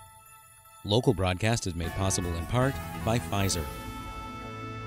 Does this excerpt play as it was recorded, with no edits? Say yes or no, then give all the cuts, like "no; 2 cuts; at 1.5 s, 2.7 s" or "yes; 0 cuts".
no; 1 cut; at 3.7 s